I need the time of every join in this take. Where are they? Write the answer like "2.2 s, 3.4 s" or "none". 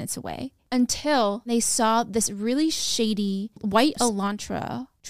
1.5 s

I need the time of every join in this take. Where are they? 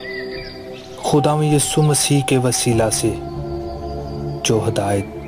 1.0 s

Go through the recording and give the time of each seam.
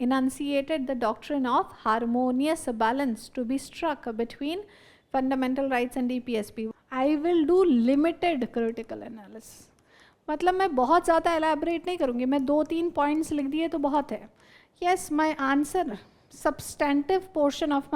6.7 s

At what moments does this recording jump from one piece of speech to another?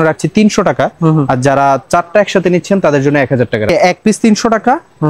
3.7 s

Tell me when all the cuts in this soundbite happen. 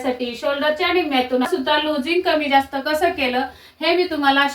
1.5 s

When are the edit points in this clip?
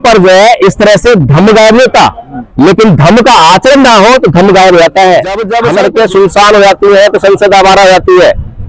5.5 s

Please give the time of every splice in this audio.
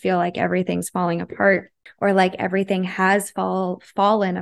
1.8 s

